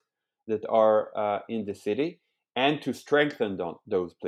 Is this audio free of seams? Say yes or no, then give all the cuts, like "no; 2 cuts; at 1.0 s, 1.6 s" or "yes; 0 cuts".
yes; 0 cuts